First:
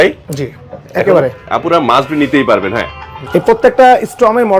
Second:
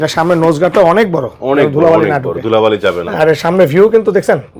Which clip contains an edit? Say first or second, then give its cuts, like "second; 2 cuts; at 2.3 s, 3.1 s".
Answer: first; 1 cut; at 3.1 s